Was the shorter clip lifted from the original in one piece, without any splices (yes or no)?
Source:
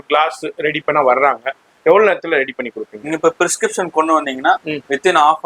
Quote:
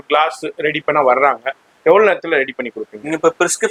yes